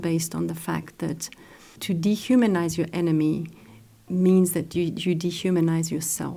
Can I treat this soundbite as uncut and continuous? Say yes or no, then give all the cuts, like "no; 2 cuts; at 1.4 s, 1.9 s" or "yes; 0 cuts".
yes; 0 cuts